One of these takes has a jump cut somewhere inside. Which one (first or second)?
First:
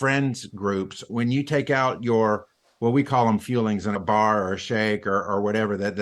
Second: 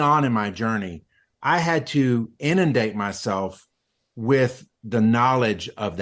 first